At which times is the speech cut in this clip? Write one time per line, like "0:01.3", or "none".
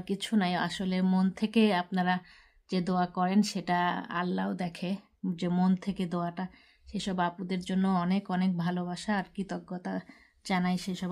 none